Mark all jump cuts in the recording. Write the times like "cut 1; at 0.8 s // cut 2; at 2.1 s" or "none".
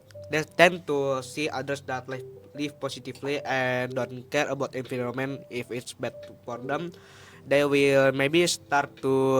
none